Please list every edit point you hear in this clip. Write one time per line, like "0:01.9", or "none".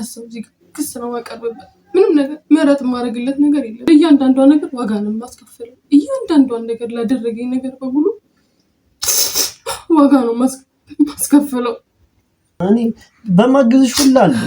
0:03.8
0:12.6